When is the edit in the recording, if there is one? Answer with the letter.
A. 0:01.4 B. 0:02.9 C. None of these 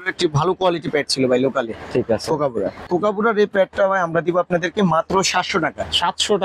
B